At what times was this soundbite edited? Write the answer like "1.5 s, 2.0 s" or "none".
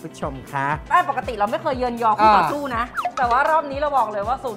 0.9 s, 3.0 s